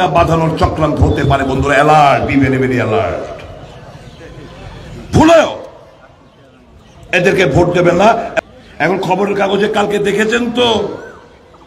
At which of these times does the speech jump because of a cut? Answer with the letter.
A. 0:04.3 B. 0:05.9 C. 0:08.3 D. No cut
C